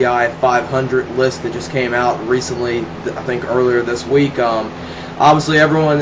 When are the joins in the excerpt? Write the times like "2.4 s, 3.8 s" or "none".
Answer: none